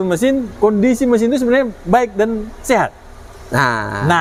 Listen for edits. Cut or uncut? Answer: uncut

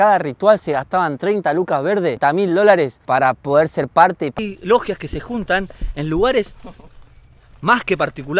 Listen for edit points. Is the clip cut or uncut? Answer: cut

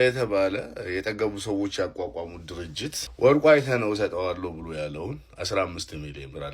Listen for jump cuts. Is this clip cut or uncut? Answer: cut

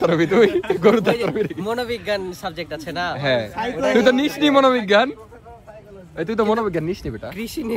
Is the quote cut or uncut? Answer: uncut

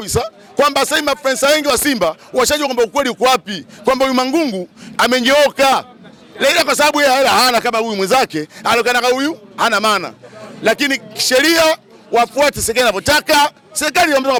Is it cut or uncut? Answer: uncut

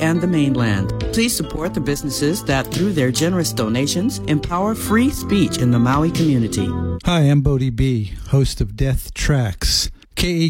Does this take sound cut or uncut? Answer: cut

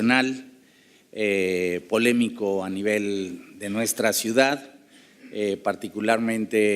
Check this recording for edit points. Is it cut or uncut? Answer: cut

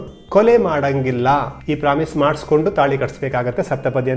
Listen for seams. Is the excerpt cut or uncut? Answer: cut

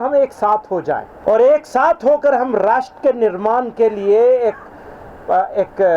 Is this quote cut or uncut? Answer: cut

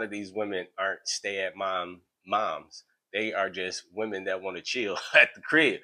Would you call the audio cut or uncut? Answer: uncut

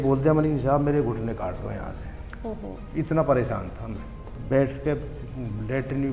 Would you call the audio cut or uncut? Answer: cut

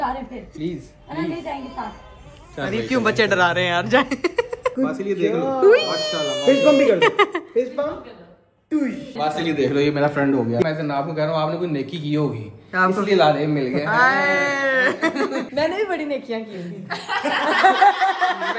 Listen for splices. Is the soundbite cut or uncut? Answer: cut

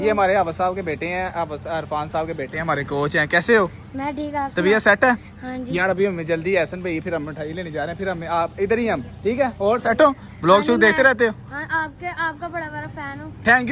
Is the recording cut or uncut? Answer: uncut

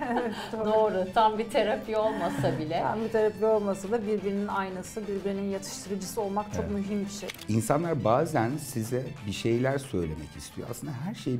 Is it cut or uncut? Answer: cut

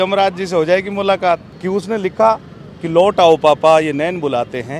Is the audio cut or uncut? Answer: cut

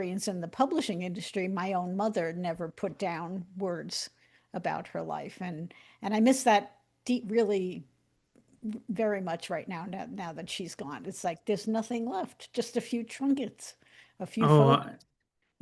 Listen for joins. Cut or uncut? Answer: uncut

